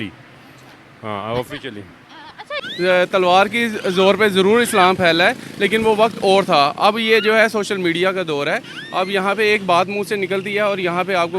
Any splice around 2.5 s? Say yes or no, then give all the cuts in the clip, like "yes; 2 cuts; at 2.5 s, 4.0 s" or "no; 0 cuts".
yes; 1 cut; at 2.5 s